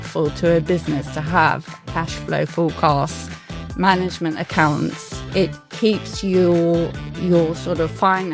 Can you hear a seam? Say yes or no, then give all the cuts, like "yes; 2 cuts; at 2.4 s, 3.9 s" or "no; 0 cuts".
yes; 1 cut; at 5.6 s